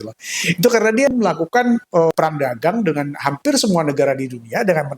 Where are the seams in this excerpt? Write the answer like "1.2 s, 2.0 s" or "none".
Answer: 1.1 s, 2.1 s